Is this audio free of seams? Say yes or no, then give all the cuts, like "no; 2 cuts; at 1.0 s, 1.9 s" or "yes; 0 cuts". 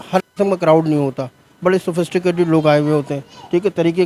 yes; 0 cuts